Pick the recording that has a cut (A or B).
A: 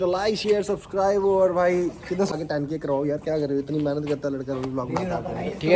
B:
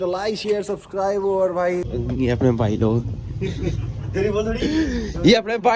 B